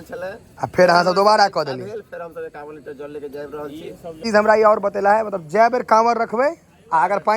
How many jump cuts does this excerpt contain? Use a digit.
1